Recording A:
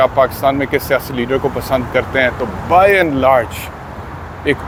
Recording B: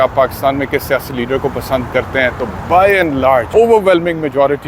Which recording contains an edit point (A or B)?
B